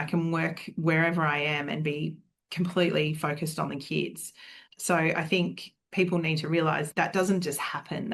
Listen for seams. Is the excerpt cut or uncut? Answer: cut